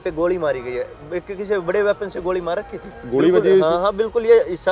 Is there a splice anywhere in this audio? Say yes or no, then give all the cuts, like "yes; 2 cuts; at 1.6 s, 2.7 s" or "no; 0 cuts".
no; 0 cuts